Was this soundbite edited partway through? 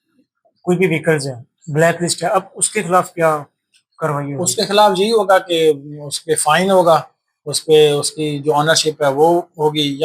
no; 0 cuts

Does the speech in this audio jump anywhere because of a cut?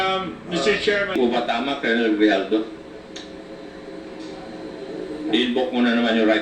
yes; 1 cut; at 1.2 s

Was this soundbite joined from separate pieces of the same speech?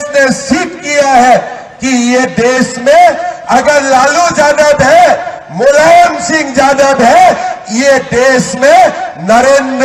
no; 0 cuts

